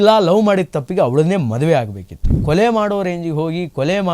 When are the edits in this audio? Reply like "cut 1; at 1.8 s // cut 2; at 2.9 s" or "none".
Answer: cut 1; at 2.4 s